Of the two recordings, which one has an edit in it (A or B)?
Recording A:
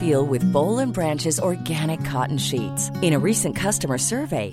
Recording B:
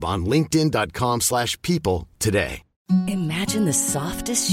B